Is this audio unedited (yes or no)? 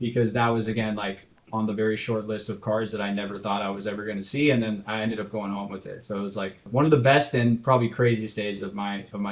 no